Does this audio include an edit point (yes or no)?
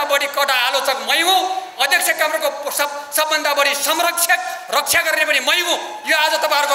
no